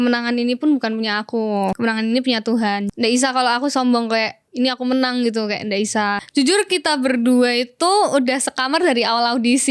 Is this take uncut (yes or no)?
no